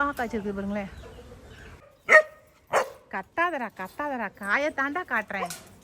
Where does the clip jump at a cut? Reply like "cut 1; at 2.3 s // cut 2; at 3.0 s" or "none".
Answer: cut 1; at 1.8 s